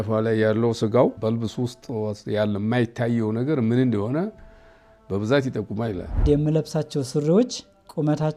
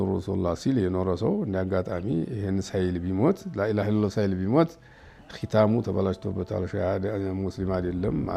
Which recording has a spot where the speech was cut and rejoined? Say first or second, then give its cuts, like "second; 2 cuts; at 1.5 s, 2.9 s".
first; 2 cuts; at 1.2 s, 6.2 s